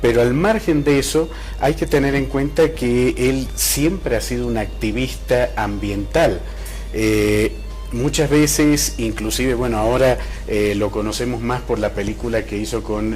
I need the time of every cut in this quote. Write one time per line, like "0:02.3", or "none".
0:03.3